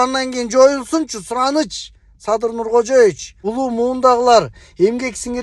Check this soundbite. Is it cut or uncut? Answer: cut